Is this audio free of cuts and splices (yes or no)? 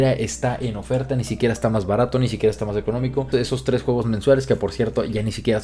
no